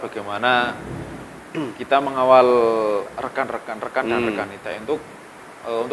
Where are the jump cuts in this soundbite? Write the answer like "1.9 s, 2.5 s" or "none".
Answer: none